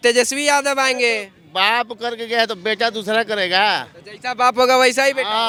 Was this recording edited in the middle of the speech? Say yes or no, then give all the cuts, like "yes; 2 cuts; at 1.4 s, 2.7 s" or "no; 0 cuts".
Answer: no; 0 cuts